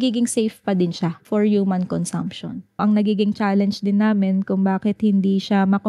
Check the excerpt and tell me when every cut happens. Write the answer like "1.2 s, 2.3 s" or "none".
1.2 s, 2.8 s